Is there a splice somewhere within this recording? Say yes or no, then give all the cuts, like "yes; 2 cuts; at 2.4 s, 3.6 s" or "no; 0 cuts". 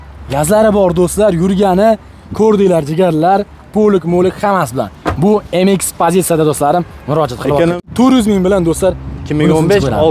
yes; 1 cut; at 7.9 s